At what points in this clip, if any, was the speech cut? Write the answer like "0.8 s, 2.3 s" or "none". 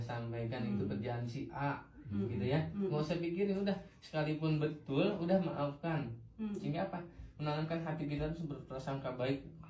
none